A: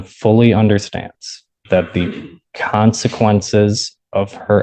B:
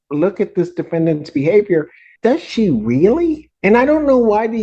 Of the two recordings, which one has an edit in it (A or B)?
B